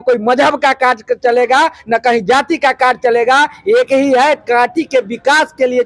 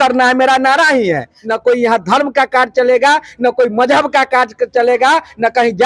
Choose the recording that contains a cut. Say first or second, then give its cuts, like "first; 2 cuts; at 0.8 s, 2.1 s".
second; 1 cut; at 1.4 s